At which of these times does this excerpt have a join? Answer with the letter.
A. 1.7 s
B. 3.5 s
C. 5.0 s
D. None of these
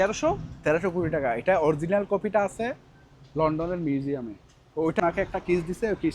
C